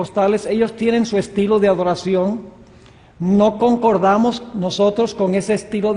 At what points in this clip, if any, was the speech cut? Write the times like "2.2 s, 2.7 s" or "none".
1.3 s

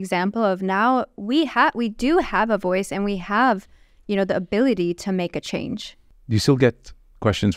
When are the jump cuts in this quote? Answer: 6.0 s

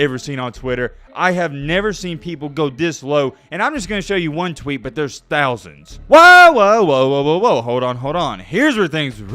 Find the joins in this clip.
5.9 s

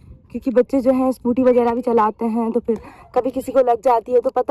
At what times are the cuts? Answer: none

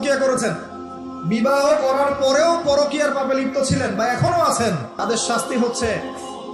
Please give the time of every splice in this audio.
4.9 s

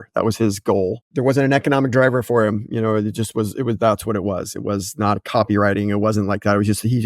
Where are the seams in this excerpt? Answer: 1.0 s

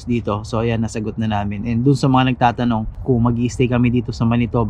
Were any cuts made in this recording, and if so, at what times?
2.9 s

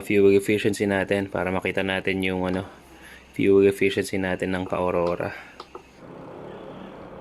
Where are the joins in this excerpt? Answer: 6.0 s

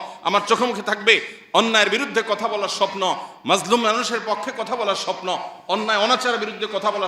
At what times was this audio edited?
none

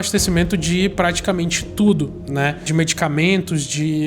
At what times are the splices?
2.7 s

